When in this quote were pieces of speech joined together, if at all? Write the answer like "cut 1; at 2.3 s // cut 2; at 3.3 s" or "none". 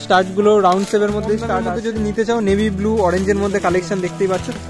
cut 1; at 1.6 s